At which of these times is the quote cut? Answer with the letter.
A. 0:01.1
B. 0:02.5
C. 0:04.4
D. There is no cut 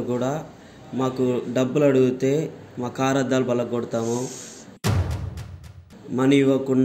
D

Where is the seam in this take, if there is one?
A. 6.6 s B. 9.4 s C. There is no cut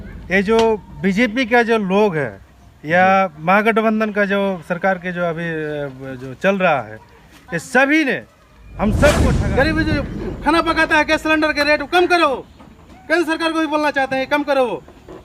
B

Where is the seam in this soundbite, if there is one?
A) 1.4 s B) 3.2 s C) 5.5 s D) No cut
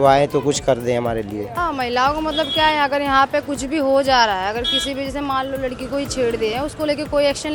A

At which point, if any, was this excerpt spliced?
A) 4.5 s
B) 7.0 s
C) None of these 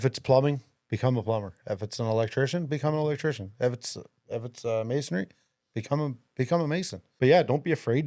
B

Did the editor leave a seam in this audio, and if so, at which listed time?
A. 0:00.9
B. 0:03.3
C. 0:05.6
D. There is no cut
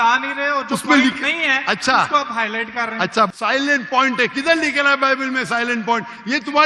B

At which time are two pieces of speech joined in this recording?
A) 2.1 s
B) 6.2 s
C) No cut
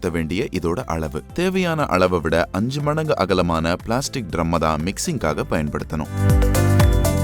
B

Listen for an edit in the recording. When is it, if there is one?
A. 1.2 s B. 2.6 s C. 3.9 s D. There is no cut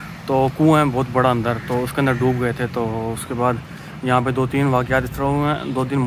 D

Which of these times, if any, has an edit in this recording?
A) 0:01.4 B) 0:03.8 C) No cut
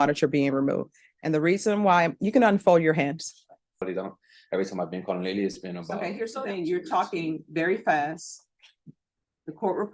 B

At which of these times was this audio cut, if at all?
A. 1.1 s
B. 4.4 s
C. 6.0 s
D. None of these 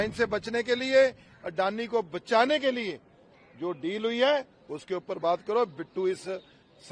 D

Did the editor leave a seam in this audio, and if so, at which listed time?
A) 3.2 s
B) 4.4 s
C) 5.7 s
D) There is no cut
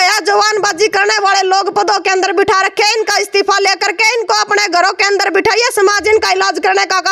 D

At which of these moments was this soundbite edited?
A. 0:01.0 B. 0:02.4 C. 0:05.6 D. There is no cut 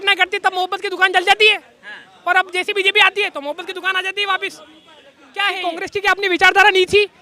C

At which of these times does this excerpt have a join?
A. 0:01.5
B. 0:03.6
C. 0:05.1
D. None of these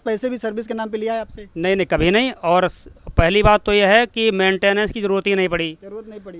D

